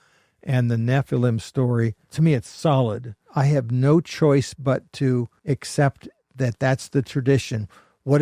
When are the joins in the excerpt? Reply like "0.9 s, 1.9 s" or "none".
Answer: 2.0 s, 3.2 s, 5.3 s